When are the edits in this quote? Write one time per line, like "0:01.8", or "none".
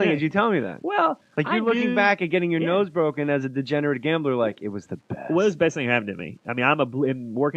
none